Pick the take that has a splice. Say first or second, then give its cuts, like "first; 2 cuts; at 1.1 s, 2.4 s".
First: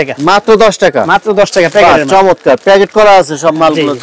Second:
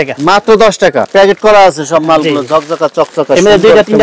second; 1 cut; at 1.1 s